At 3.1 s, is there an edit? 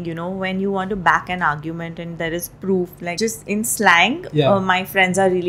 yes; 1 cut; at 3.1 s

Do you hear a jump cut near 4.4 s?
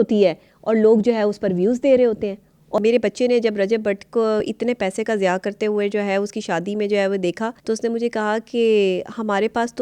yes; 3 cuts; at 2.6 s, 4.4 s, 7.6 s

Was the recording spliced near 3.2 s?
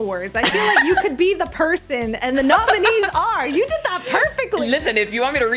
no; 1 cut; at 4.6 s

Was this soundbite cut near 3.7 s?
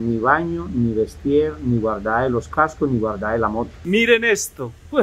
yes; 1 cut; at 3.7 s

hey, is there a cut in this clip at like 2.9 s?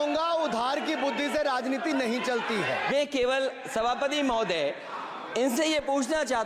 yes; 1 cut; at 2.9 s

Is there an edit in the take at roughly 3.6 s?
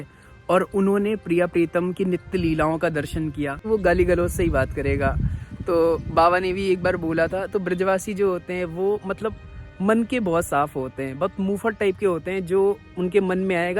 yes; 1 cut; at 3.6 s

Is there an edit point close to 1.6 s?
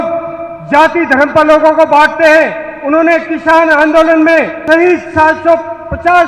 no; 1 cut; at 4.6 s

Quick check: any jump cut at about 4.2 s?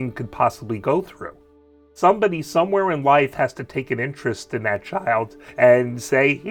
no; 1 cut; at 1.9 s

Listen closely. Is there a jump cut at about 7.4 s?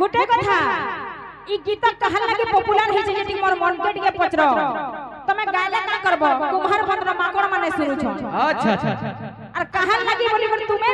no; 0 cuts

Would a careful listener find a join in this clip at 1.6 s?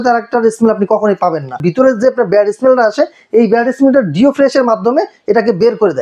yes; 1 cut; at 1.6 s

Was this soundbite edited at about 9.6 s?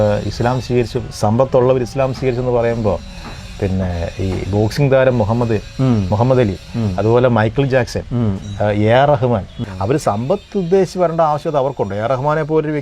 yes; 1 cut; at 9.6 s

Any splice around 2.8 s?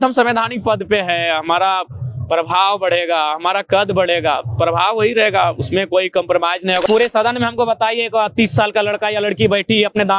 no; 1 cut; at 6.8 s

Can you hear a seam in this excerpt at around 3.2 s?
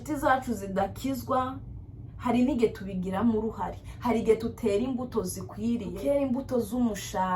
no; 1 cut; at 5.9 s

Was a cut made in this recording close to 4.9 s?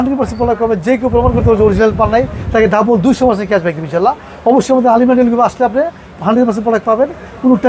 no; 1 cut; at 6.1 s

